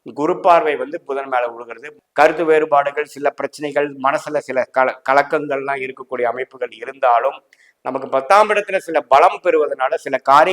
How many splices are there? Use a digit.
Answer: 1